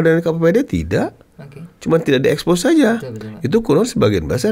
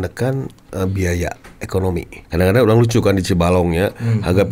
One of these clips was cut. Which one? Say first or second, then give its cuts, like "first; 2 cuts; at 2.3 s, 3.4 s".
second; 1 cut; at 2.2 s